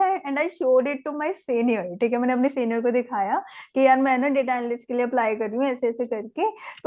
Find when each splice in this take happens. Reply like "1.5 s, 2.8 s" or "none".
none